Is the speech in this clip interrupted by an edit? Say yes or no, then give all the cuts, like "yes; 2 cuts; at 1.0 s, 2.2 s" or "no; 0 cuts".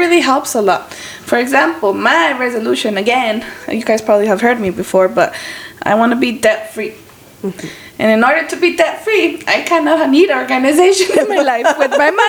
no; 0 cuts